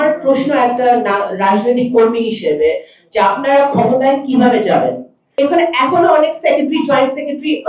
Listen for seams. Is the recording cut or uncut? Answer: cut